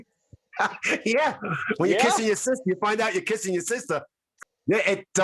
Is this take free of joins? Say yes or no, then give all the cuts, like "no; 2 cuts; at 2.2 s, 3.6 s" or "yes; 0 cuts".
no; 1 cut; at 4.3 s